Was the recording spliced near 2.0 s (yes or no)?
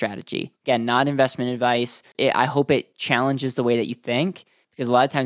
yes